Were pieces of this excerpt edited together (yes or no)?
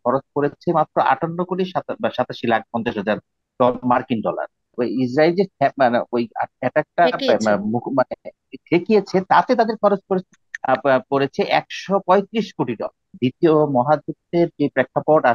yes